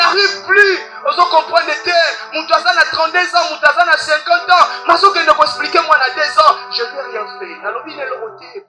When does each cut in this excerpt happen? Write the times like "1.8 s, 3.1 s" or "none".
none

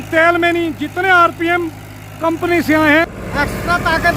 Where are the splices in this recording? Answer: 3.1 s

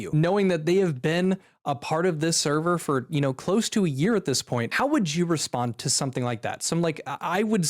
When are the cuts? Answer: none

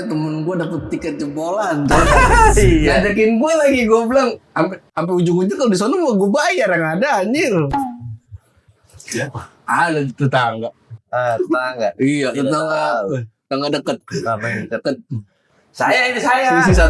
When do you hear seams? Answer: none

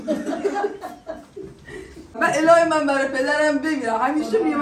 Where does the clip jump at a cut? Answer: 2.1 s

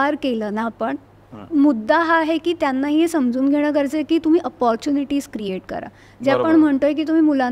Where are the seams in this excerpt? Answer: none

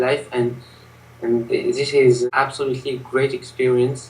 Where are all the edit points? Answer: 2.2 s

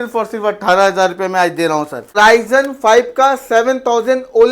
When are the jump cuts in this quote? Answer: 2.1 s

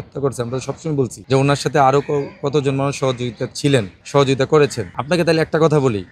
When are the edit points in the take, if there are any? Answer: 1.2 s, 4.0 s, 4.9 s

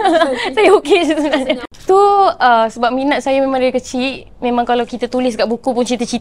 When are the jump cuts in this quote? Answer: 1.7 s

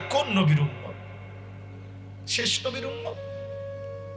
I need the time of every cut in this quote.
2.9 s

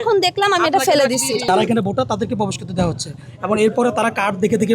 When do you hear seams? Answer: 1.5 s

